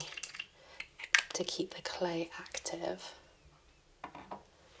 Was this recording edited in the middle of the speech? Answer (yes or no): no